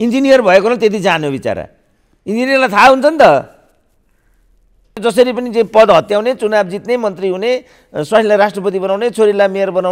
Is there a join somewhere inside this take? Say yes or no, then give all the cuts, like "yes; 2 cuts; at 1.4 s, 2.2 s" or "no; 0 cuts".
yes; 1 cut; at 5.0 s